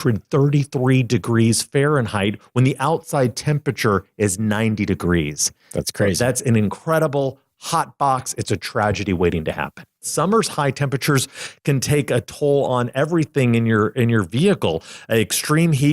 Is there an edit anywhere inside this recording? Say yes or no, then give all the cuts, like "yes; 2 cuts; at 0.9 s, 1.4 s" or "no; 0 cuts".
yes; 1 cut; at 10.1 s